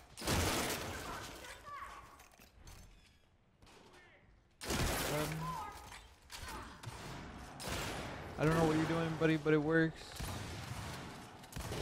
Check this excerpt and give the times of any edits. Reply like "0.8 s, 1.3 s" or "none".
none